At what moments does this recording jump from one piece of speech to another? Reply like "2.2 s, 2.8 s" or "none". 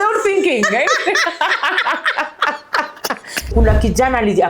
3.5 s